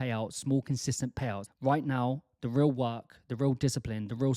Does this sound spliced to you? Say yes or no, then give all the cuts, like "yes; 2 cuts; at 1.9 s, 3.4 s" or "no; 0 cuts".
yes; 1 cut; at 1.5 s